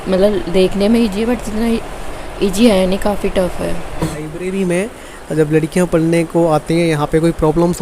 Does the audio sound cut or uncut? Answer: cut